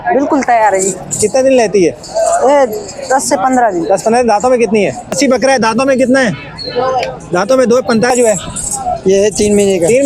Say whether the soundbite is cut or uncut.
cut